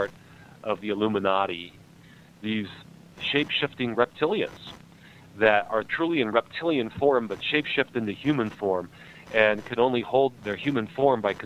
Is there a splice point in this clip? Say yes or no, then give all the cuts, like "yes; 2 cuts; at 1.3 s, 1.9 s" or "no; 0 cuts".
yes; 5 cuts; at 0.8 s, 1.9 s, 3.1 s, 5.9 s, 10.4 s